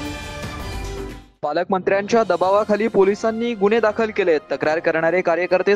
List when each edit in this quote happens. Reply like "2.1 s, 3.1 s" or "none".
1.0 s